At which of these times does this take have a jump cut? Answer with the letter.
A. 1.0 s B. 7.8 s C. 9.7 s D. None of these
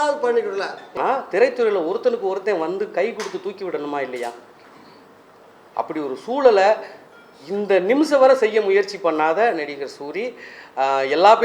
A